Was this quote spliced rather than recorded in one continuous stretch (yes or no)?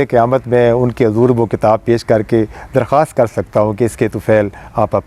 no